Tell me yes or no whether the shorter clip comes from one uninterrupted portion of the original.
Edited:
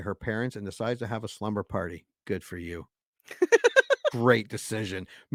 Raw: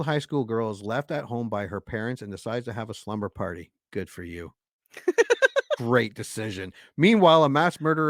yes